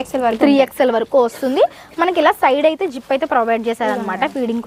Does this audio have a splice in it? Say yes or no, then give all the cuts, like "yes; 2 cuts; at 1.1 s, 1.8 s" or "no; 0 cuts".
no; 0 cuts